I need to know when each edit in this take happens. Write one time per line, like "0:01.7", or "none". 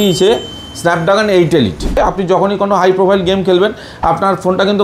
0:02.0

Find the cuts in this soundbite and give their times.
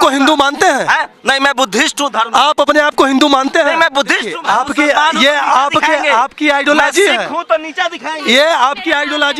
0:04.3

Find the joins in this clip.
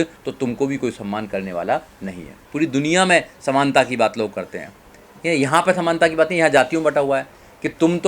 0:02.4

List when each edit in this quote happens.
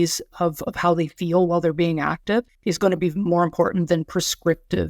0:02.5

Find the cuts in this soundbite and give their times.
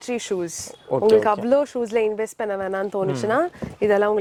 none

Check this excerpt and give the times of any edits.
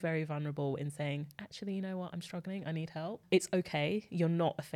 none

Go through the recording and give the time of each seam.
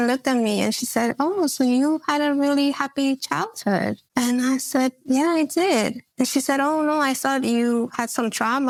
none

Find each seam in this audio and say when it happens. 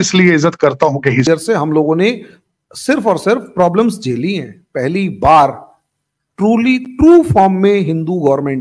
0:01.2

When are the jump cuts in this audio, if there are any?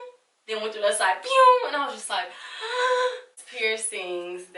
0:03.4

